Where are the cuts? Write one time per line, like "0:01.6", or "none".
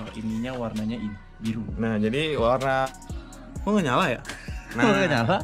0:02.9